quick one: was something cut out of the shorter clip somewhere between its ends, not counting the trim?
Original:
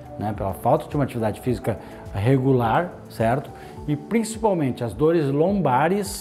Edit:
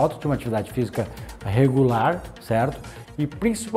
no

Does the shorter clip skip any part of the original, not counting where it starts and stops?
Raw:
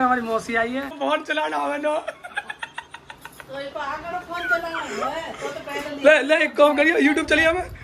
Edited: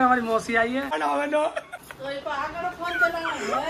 yes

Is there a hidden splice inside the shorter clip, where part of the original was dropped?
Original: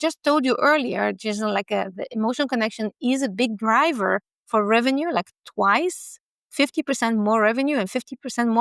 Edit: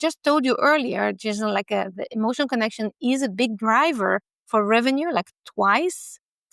no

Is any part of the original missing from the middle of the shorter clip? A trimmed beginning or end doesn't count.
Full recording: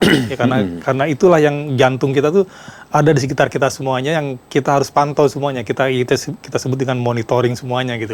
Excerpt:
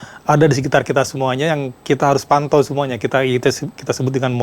no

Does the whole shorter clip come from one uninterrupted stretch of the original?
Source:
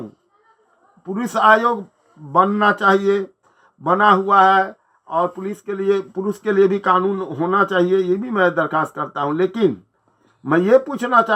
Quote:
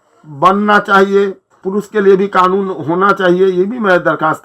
no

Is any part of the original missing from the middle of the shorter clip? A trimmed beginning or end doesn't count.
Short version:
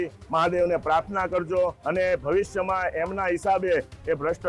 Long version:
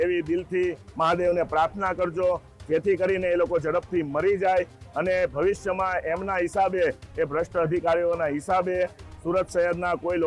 yes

